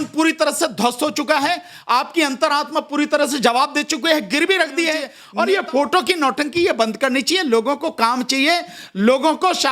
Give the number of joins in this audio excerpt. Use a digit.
1